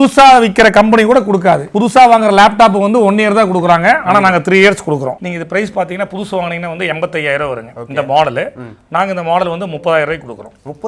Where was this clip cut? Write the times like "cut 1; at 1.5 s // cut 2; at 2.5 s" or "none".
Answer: cut 1; at 5.2 s